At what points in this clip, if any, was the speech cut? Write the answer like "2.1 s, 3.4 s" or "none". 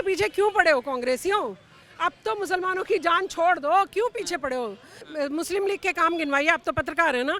5.1 s